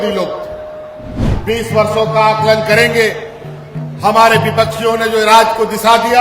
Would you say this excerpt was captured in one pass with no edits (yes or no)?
no